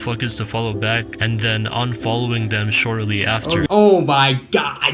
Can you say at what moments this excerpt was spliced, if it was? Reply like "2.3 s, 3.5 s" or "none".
3.7 s